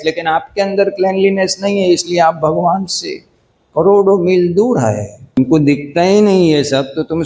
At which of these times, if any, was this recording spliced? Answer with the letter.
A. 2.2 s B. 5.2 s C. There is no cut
B